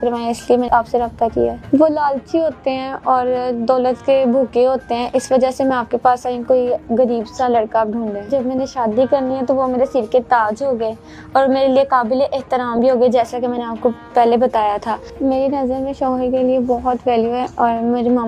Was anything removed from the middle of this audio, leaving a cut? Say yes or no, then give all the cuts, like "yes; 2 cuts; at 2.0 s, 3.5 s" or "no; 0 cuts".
yes; 4 cuts; at 1.6 s, 6.4 s, 8.3 s, 15.0 s